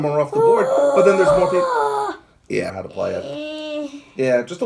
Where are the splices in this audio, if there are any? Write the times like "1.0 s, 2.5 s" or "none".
2.8 s